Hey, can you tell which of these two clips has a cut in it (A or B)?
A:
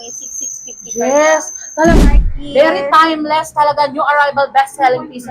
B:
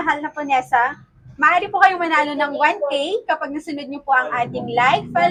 A